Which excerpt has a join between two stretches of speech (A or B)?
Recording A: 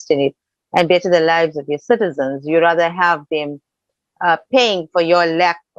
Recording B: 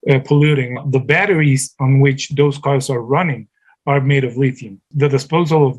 B